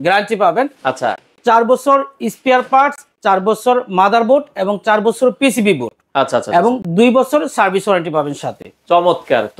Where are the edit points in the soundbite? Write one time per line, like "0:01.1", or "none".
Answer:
none